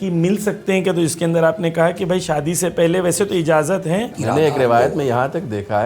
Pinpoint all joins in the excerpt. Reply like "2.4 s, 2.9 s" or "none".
4.2 s